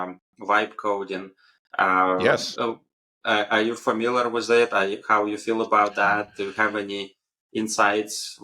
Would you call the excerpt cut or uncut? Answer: uncut